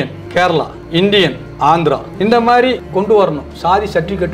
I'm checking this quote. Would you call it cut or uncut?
uncut